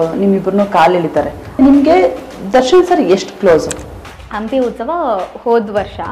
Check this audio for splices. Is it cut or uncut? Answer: uncut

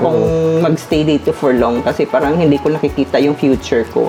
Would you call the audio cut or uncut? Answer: uncut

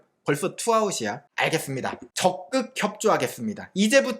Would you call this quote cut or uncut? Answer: cut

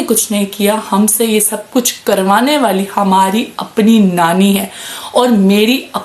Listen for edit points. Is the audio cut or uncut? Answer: uncut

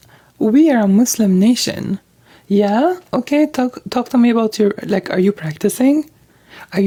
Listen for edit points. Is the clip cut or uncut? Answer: uncut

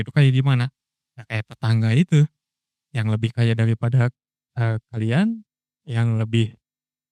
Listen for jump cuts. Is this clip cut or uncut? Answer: uncut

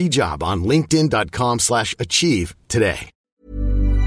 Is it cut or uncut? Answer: cut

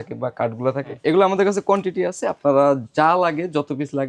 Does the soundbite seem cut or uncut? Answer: cut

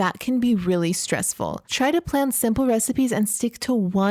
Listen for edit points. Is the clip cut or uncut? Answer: cut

